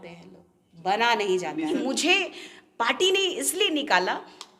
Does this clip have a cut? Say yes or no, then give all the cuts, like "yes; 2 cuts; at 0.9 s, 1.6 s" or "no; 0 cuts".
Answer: yes; 1 cut; at 1.7 s